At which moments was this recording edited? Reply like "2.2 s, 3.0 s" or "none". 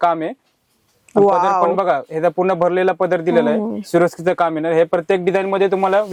none